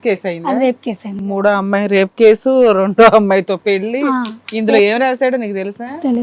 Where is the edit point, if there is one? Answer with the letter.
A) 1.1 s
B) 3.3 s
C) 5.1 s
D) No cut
A